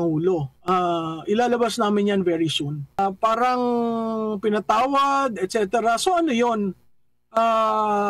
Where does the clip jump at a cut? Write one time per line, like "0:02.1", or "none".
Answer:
0:03.0